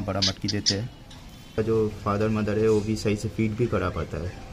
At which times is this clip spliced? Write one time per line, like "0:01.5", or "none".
0:01.6